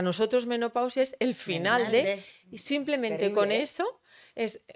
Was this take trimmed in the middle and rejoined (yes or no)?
no